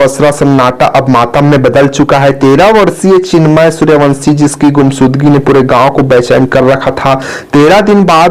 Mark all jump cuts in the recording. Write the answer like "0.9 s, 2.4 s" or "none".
none